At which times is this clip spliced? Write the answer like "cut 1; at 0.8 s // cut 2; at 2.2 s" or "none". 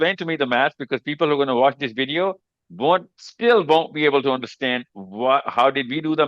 none